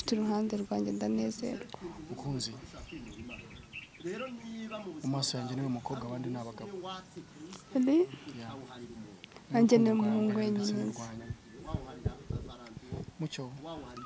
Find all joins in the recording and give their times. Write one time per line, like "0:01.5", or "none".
none